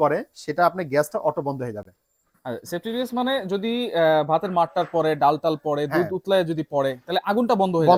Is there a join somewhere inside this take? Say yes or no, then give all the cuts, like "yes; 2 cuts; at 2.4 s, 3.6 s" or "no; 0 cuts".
no; 0 cuts